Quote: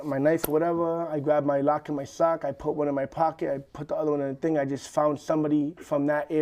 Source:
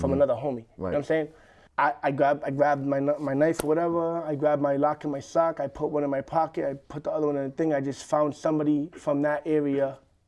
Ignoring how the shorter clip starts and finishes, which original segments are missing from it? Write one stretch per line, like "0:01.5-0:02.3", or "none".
none